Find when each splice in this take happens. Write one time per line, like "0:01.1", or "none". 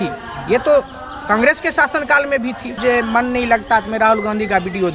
0:02.7